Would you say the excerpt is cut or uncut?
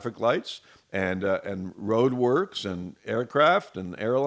uncut